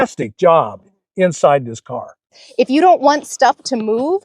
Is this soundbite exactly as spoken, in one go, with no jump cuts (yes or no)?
no